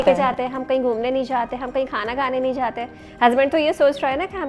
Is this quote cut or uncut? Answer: uncut